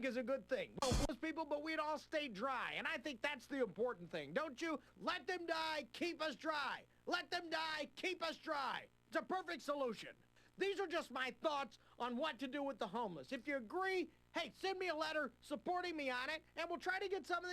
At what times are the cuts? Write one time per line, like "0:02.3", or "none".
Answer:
0:01.0